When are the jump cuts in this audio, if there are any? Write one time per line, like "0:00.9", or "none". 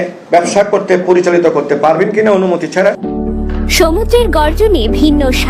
none